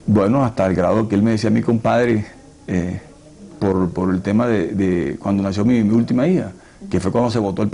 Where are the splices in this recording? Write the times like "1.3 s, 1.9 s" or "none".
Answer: none